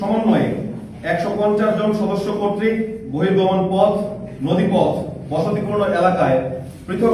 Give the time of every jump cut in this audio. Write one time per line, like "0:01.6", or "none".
none